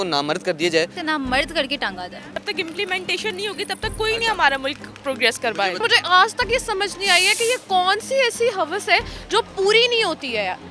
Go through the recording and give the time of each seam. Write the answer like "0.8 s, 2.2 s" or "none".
1.0 s, 2.3 s, 5.8 s